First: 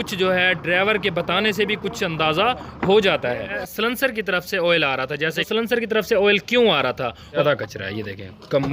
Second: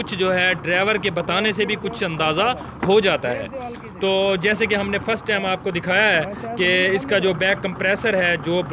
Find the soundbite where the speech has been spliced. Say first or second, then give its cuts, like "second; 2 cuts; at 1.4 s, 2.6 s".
first; 3 cuts; at 3.6 s, 5.4 s, 7.4 s